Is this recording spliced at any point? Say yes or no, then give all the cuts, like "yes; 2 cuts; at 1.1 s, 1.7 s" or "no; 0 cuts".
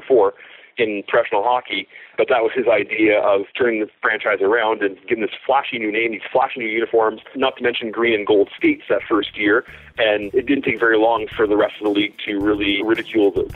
yes; 5 cuts; at 2.1 s, 3.5 s, 7.3 s, 10.2 s, 12.8 s